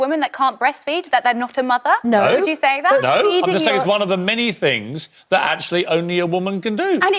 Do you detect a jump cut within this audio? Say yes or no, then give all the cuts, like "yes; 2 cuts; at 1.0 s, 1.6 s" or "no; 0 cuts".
no; 0 cuts